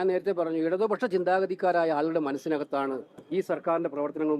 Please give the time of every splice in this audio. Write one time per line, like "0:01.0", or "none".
0:03.1